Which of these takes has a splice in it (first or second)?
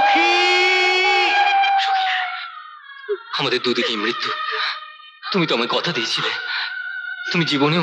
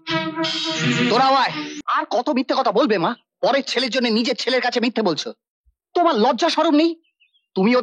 second